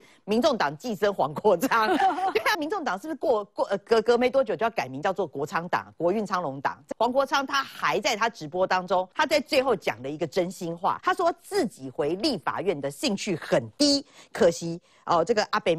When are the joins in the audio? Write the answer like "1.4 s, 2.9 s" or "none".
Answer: 2.6 s, 6.9 s, 9.1 s, 11.0 s